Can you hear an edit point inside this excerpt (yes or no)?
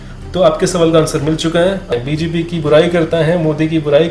yes